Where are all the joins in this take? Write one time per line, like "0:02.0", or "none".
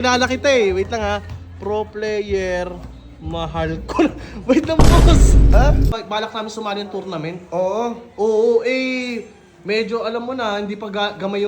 0:05.9